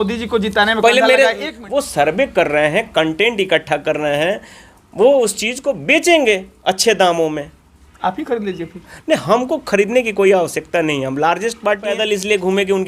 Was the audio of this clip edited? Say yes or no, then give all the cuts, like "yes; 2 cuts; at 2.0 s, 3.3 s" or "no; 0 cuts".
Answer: yes; 2 cuts; at 1.5 s, 11.9 s